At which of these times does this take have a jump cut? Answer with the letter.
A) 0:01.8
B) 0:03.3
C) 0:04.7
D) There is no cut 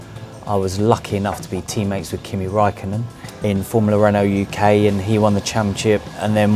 B